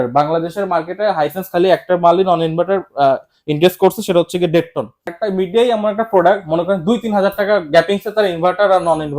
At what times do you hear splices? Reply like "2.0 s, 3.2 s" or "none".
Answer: 5.1 s